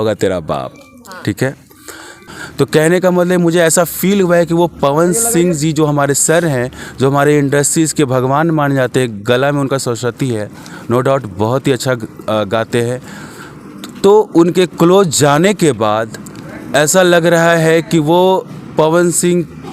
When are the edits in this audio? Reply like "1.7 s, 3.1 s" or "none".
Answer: 2.2 s